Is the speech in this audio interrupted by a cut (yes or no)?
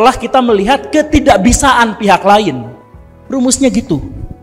no